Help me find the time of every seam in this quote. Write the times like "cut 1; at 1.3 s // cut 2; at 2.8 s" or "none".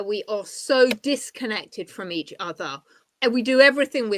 none

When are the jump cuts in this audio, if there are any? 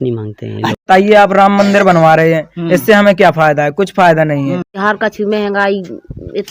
cut 1; at 0.8 s // cut 2; at 4.8 s

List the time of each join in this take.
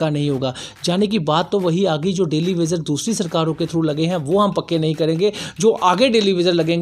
none

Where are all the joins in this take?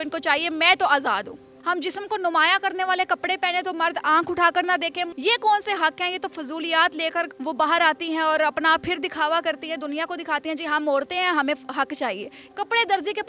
cut 1; at 1.5 s // cut 2; at 5.1 s // cut 3; at 7.3 s // cut 4; at 12.4 s

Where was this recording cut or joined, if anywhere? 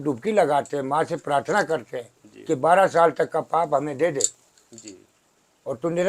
none

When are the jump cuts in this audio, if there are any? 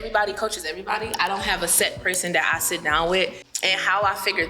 cut 1; at 3.5 s

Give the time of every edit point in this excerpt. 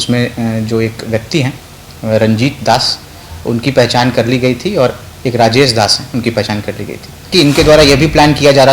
cut 1; at 7.3 s

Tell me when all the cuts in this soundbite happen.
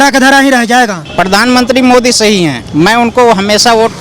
cut 1; at 1.0 s // cut 2; at 2.6 s

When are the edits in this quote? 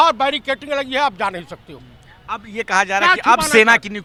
none

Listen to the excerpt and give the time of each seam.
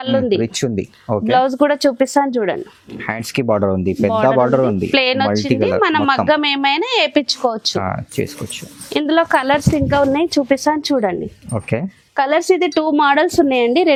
none

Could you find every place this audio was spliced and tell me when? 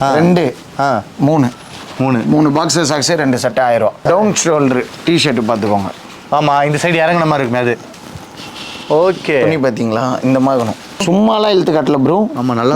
cut 1; at 4.0 s // cut 2; at 11.0 s

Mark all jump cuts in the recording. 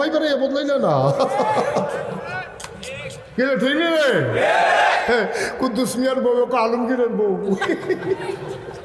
none

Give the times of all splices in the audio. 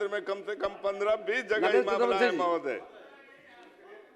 none

